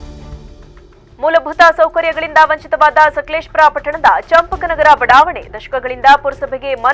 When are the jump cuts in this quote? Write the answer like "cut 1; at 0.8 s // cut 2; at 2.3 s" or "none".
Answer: cut 1; at 1.0 s